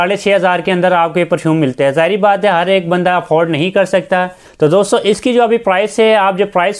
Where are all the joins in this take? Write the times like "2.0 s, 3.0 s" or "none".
4.4 s